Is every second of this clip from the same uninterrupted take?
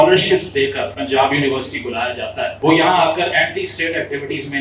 no; 2 cuts; at 0.9 s, 2.5 s

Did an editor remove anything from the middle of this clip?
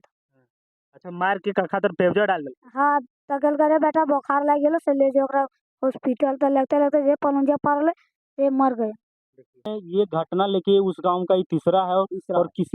yes; 1 cut; at 9.7 s

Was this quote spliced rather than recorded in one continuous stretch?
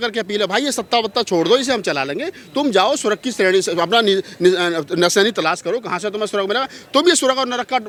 no; 0 cuts

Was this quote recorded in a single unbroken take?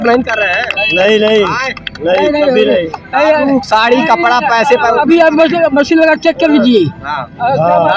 yes; 0 cuts

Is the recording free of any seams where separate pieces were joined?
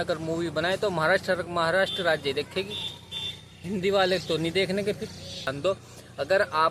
no; 1 cut; at 5.4 s

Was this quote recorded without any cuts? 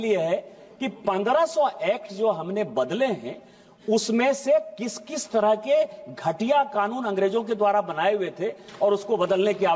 yes; 0 cuts

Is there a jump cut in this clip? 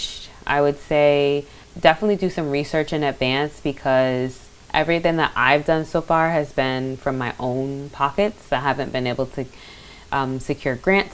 yes; 1 cut; at 1.6 s

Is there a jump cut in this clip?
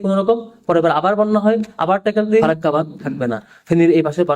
yes; 1 cut; at 2.4 s

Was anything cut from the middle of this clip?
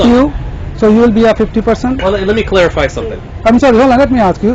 no; 0 cuts

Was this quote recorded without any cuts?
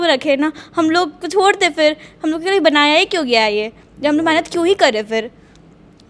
yes; 0 cuts

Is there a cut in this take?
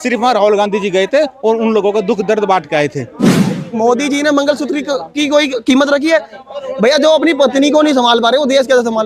yes; 1 cut; at 3.3 s

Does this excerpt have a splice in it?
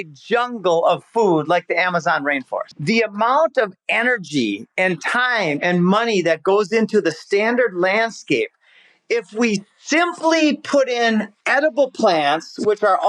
yes; 1 cut; at 2.7 s

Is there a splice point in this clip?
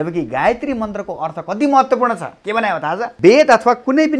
yes; 1 cut; at 3.1 s

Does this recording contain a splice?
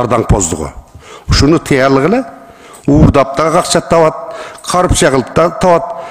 no; 0 cuts

